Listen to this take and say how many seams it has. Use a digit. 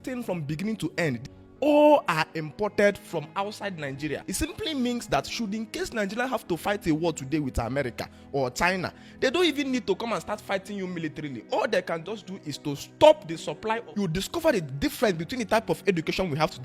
3